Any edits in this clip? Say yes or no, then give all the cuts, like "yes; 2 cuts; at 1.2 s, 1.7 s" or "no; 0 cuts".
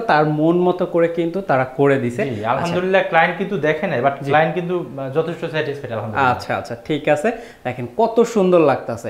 no; 0 cuts